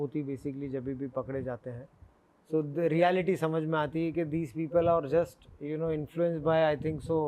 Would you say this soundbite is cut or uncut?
uncut